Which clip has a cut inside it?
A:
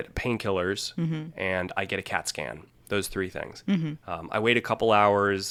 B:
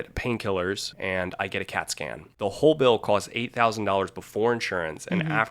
B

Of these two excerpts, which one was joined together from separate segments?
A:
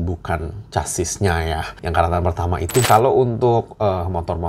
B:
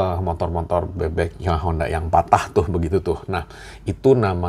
A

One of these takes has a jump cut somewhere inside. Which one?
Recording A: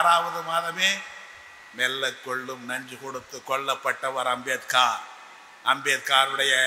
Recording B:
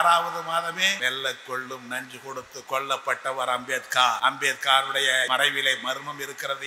B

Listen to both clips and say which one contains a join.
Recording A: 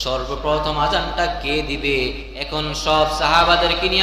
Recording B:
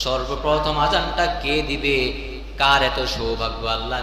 A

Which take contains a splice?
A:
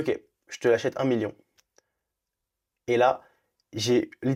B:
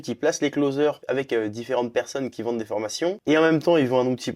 B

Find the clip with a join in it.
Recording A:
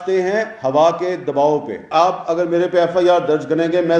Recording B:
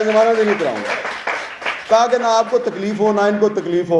A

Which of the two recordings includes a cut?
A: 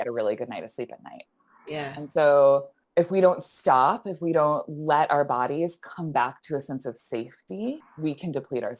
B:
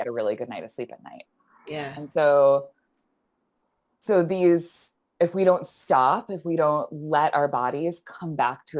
A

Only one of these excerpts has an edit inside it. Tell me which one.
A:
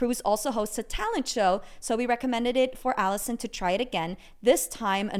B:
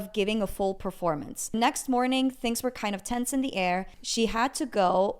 B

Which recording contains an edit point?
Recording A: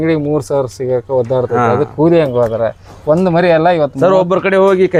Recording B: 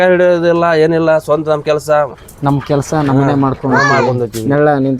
B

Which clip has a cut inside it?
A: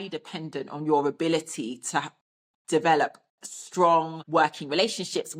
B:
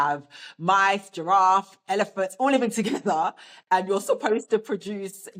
A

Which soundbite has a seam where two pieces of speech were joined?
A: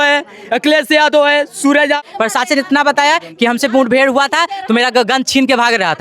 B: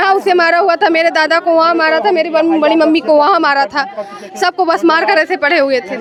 A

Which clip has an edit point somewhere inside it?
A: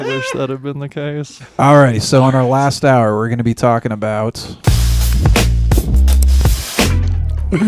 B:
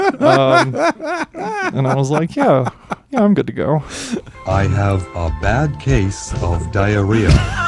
A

